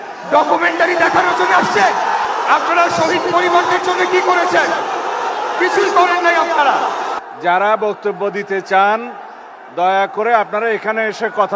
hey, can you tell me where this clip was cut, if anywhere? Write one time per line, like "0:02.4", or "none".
0:02.2
0:07.2